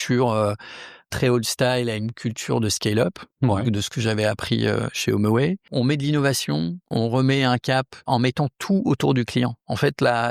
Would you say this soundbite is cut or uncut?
cut